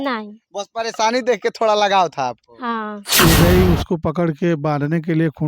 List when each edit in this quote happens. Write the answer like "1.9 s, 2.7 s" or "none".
3.0 s